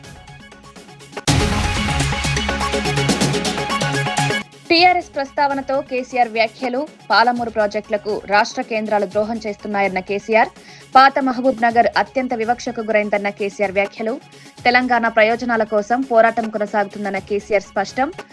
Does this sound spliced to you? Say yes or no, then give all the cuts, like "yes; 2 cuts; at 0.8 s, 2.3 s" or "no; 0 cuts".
yes; 1 cut; at 0.9 s